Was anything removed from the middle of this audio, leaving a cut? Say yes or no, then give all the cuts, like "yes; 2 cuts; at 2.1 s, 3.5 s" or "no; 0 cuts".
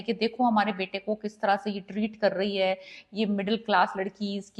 no; 0 cuts